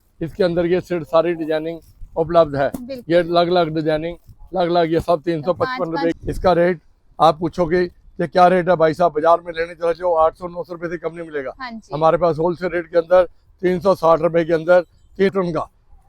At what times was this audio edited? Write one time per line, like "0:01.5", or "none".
0:06.2
0:15.3